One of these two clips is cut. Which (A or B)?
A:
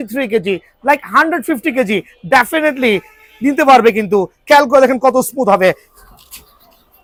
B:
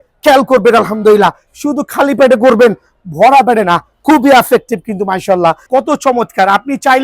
B